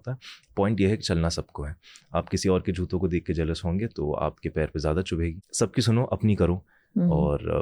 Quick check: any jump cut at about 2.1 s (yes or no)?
no